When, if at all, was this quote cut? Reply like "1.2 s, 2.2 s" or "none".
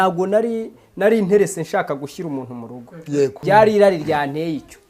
3.4 s

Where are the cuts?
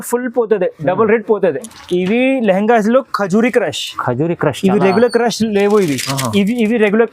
1.7 s

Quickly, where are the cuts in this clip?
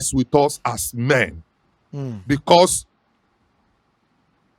none

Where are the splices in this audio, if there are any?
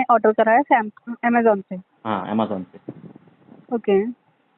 none

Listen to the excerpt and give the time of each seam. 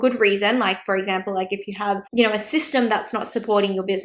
2.0 s

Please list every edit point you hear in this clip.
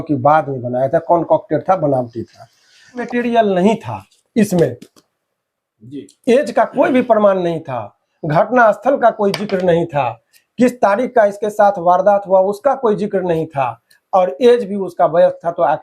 3.0 s

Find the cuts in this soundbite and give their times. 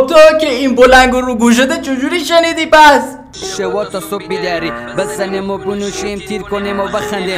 3.5 s

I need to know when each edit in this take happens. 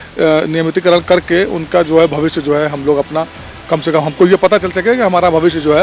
none

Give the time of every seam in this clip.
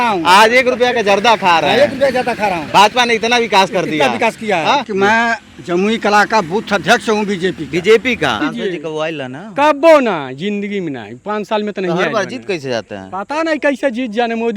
4.9 s, 8.4 s

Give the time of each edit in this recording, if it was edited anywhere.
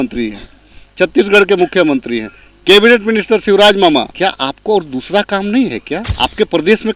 4.1 s, 6.0 s

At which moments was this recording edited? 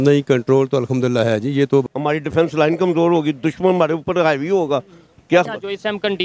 1.9 s

